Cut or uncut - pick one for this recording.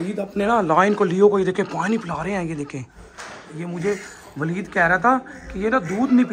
uncut